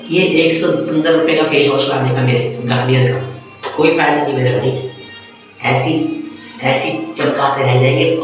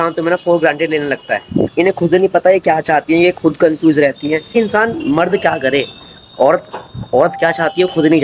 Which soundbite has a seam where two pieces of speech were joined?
second; 2 cuts; at 1.7 s, 4.5 s

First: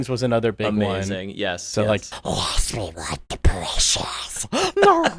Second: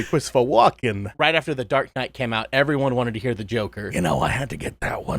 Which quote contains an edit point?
second; 2 cuts; at 1.1 s, 3.8 s

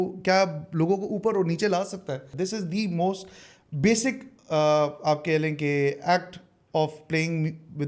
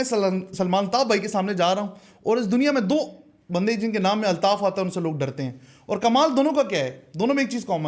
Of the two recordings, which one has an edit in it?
first; 1 cut; at 2.3 s

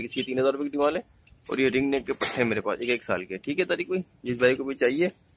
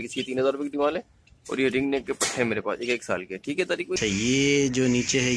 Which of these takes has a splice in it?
second; 1 cut; at 4.0 s

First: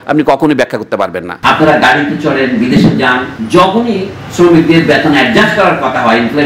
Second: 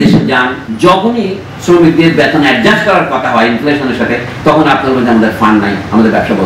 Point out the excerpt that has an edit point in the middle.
first; 1 cut; at 1.2 s

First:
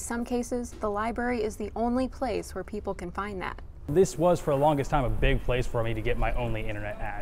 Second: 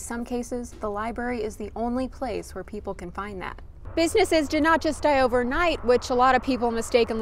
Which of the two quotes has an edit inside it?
second; 1 cut; at 3.9 s

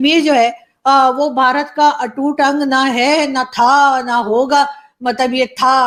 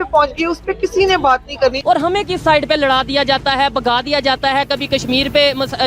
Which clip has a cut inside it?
second; 1 cut; at 1.8 s

